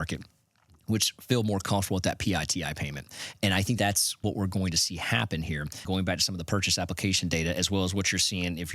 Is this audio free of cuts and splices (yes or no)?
no